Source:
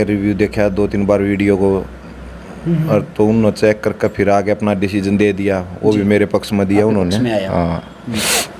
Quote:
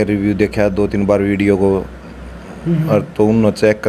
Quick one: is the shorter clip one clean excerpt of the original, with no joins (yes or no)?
yes